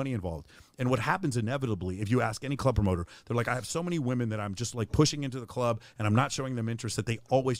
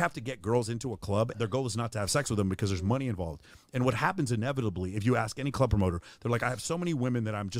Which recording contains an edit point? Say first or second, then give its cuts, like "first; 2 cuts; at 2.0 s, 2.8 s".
second; 1 cut; at 1.3 s